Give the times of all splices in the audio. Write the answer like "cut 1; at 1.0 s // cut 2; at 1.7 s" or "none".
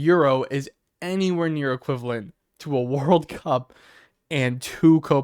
none